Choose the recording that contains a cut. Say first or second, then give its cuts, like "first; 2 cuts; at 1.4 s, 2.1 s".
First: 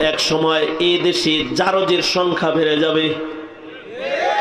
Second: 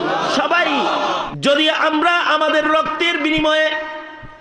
second; 1 cut; at 1.3 s